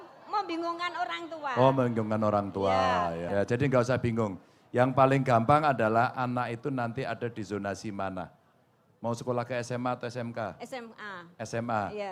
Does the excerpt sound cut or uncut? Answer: cut